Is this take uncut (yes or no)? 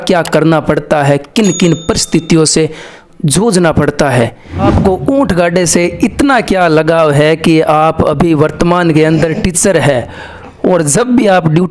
no